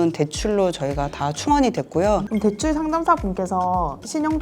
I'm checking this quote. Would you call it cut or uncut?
cut